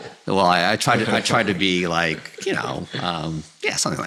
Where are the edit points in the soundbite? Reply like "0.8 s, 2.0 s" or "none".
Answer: none